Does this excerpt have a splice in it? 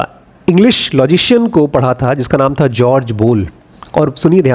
no; 0 cuts

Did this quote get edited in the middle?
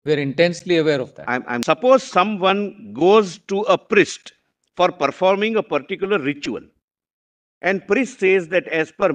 yes; 1 cut; at 1.5 s

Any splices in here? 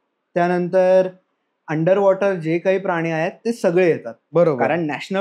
yes; 1 cut; at 4.1 s

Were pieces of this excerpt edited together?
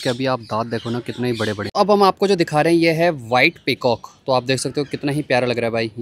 yes; 1 cut; at 1.7 s

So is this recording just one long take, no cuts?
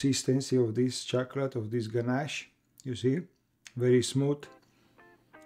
yes; 0 cuts

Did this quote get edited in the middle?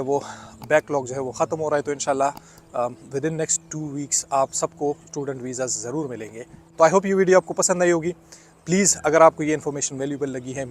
no; 0 cuts

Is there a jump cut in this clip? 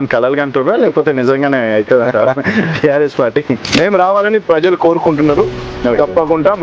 no; 0 cuts

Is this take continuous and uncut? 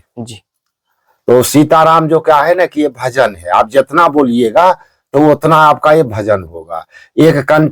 yes; 0 cuts

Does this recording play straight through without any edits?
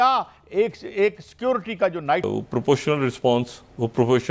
no; 1 cut; at 2.2 s

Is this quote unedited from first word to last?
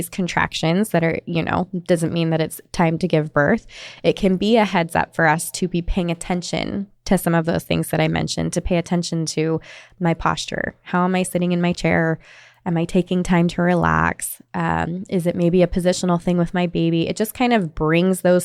yes; 0 cuts

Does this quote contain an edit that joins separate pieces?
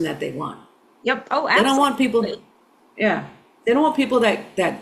no; 0 cuts

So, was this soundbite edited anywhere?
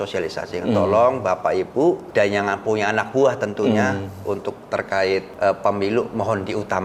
yes; 2 cuts; at 2.0 s, 5.3 s

